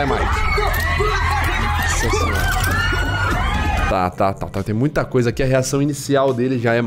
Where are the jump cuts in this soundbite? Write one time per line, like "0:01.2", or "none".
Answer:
none